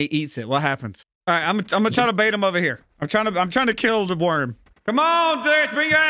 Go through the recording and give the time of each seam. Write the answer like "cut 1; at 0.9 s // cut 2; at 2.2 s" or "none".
cut 1; at 1.0 s